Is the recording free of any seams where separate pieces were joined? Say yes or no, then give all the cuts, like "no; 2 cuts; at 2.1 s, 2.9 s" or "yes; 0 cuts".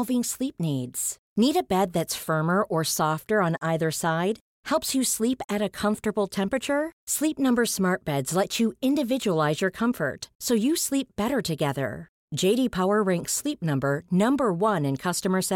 yes; 0 cuts